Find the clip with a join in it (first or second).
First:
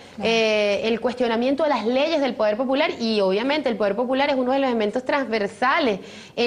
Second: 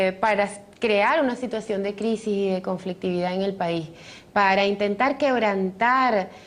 second